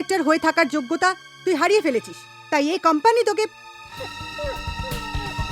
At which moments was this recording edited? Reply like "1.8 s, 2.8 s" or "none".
none